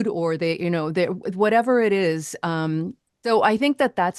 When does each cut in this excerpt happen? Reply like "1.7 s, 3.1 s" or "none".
3.2 s